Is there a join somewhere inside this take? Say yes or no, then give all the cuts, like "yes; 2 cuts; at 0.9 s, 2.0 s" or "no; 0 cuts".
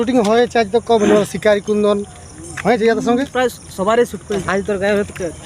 yes; 1 cut; at 4.4 s